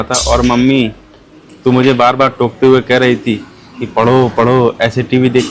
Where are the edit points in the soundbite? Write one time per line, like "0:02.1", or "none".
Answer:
none